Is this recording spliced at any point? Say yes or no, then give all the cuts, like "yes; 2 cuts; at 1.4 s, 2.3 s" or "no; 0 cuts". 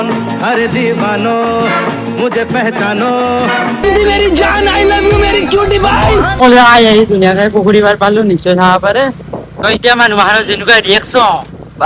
no; 0 cuts